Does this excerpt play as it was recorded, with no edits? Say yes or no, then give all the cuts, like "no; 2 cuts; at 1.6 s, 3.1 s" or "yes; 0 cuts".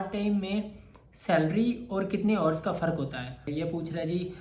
no; 1 cut; at 3.5 s